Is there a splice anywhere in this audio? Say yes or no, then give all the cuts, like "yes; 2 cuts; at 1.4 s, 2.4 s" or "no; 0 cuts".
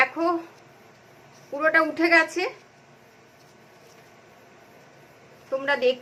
no; 0 cuts